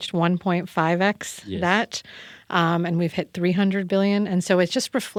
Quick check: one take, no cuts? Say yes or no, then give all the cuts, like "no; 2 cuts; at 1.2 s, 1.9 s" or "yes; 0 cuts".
yes; 0 cuts